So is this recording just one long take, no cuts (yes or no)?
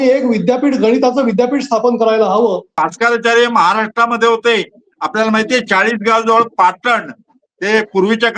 no